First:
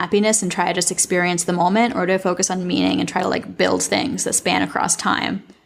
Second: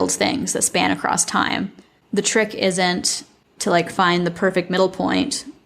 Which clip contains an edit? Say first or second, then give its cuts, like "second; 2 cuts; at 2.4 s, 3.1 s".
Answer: second; 1 cut; at 3.2 s